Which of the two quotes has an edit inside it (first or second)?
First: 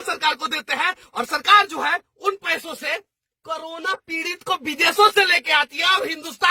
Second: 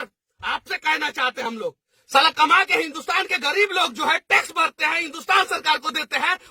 second